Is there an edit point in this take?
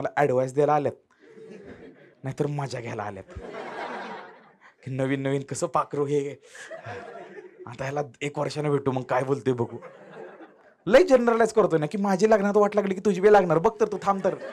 no; 0 cuts

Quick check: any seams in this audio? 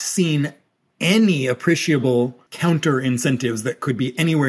yes; 1 cut; at 2.5 s

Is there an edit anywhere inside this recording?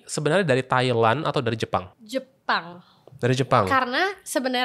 no; 0 cuts

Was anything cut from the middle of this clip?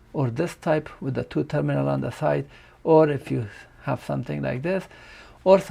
no; 0 cuts

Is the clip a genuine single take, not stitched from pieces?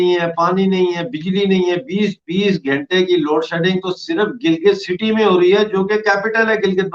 yes; 0 cuts

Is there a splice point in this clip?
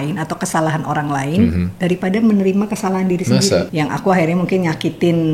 yes; 1 cut; at 3.7 s

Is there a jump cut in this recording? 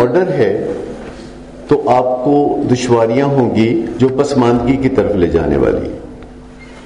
yes; 1 cut; at 3.9 s

